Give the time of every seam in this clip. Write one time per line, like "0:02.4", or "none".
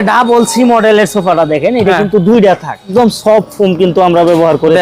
0:02.9